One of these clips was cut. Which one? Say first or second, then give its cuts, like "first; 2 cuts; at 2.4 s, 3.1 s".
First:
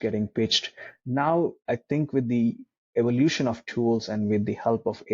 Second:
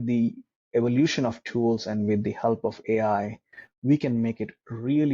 first; 1 cut; at 0.9 s